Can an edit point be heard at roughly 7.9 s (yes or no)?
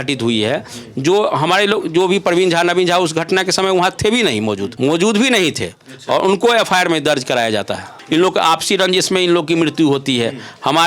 yes